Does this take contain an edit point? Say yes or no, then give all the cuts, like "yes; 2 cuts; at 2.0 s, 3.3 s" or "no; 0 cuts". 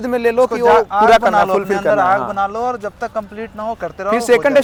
no; 0 cuts